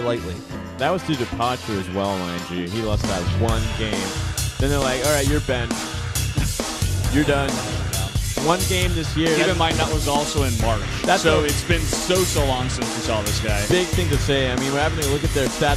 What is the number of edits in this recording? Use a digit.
0